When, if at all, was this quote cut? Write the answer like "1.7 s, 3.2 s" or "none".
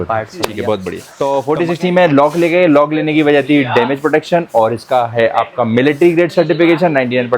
1.1 s